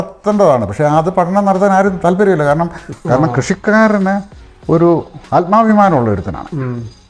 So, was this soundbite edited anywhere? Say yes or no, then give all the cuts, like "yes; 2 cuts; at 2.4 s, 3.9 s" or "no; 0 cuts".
yes; 1 cut; at 2.9 s